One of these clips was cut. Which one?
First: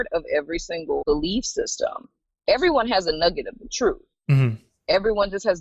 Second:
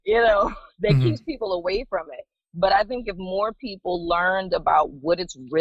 first; 1 cut; at 1.0 s

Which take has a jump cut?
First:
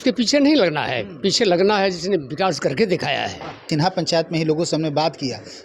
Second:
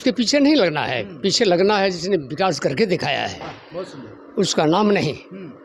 first; 1 cut; at 3.7 s

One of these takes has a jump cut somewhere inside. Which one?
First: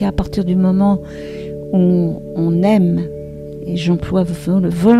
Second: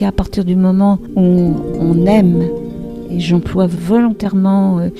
second; 2 cuts; at 1.1 s, 3.8 s

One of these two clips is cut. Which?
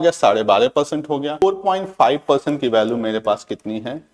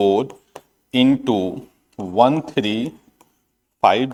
first; 1 cut; at 1.4 s

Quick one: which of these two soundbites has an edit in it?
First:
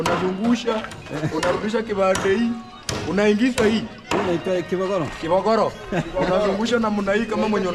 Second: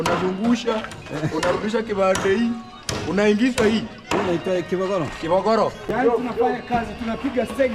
second; 1 cut; at 5.9 s

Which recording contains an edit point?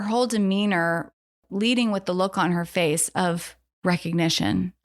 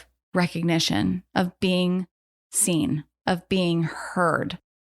first; 1 cut; at 1.4 s

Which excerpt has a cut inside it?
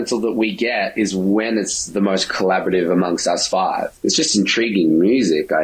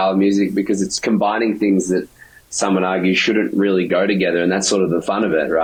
first; 1 cut; at 3.9 s

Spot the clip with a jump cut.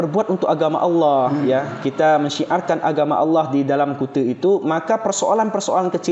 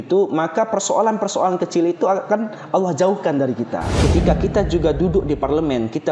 second; 1 cut; at 3.9 s

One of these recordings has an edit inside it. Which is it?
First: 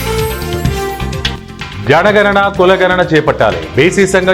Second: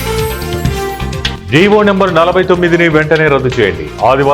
second; 1 cut; at 1.4 s

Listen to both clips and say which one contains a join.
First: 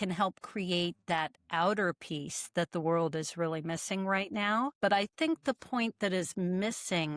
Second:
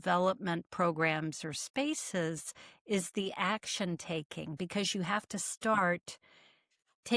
first; 1 cut; at 4.7 s

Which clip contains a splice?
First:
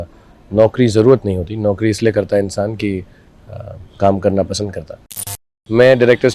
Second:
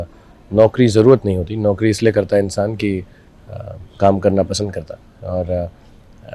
first; 1 cut; at 5.2 s

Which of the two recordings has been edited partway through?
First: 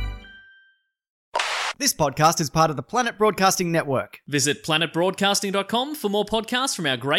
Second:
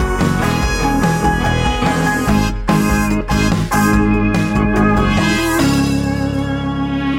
first; 1 cut; at 1.5 s

